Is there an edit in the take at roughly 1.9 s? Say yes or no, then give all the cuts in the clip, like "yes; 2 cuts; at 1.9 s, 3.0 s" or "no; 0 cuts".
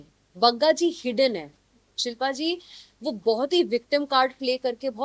yes; 1 cut; at 1.9 s